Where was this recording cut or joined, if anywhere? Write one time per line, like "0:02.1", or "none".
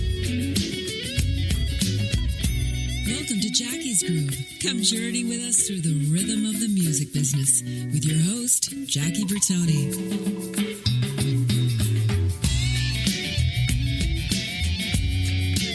none